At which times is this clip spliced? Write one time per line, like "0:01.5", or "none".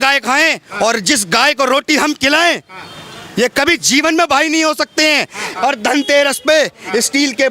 0:05.5